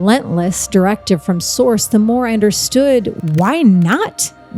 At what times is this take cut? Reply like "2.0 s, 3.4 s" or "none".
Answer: 3.1 s